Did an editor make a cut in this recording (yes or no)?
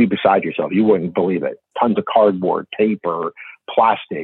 yes